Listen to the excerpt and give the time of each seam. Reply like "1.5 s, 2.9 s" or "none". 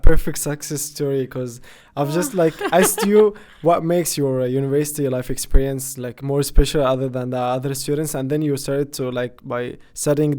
none